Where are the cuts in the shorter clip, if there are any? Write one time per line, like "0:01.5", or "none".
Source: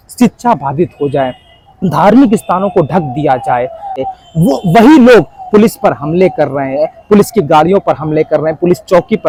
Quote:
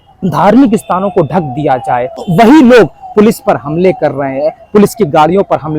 0:02.2